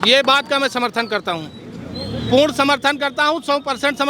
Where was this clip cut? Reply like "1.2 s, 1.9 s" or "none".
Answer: none